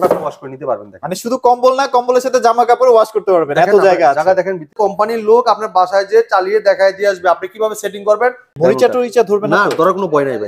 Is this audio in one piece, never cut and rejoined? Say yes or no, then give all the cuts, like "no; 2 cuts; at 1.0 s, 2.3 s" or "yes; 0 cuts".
no; 2 cuts; at 4.7 s, 8.5 s